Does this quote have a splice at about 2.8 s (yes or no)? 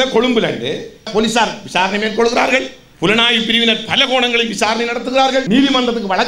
yes